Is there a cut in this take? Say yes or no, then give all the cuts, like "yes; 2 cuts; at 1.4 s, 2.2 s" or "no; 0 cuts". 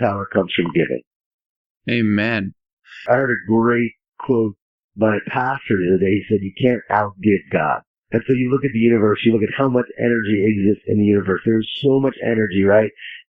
no; 0 cuts